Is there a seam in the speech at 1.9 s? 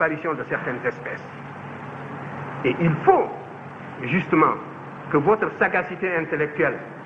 no; 0 cuts

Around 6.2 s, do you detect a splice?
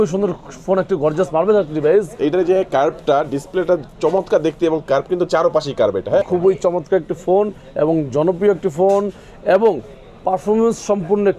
yes; 2 cuts; at 2.1 s, 6.2 s

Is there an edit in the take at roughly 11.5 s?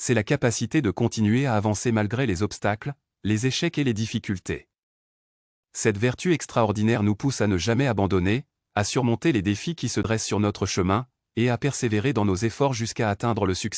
no; 1 cut; at 10.1 s

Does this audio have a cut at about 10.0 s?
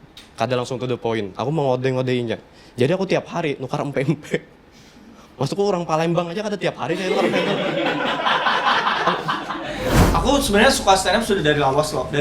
yes; 1 cut; at 10.0 s

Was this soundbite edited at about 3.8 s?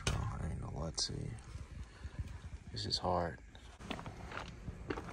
yes; 1 cut; at 3.8 s

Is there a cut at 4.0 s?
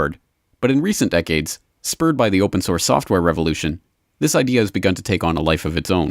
yes; 1 cut; at 4.0 s

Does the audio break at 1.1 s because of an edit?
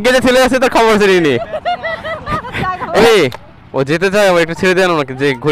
no; 1 cut; at 3.0 s

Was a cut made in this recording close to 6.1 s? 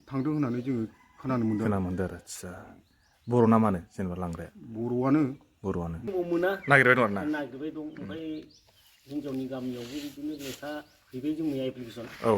yes; 1 cut; at 6.1 s

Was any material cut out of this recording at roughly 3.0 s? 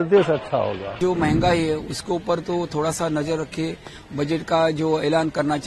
no; 1 cut; at 1.0 s

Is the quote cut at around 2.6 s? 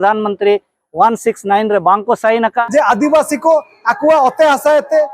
yes; 1 cut; at 2.6 s

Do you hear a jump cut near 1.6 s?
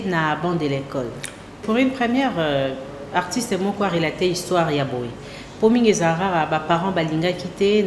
yes; 1 cut; at 1.6 s

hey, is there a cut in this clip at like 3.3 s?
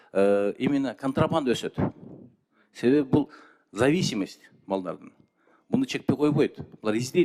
no; 0 cuts

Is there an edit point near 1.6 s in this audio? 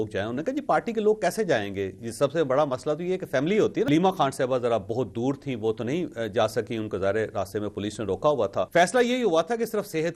no; 2 cuts; at 3.9 s, 8.7 s

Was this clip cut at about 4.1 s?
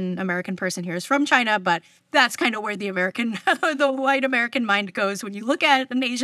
no; 1 cut; at 1.9 s

